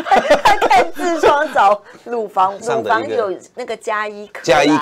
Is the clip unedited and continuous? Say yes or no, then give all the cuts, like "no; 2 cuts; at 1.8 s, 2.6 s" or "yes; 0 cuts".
no; 1 cut; at 2.6 s